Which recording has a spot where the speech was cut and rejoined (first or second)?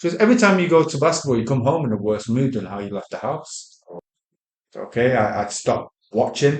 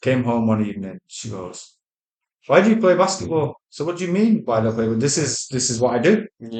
first